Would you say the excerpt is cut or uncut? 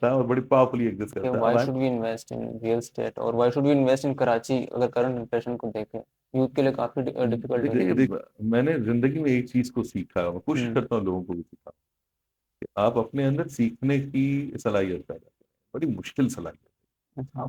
cut